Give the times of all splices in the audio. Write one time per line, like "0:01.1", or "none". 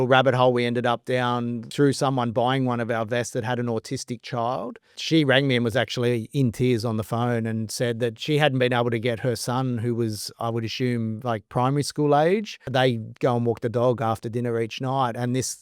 0:01.6
0:05.0
0:12.6